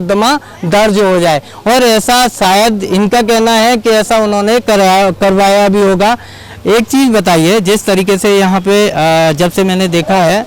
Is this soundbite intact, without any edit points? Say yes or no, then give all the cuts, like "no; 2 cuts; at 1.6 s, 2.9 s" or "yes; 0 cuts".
yes; 0 cuts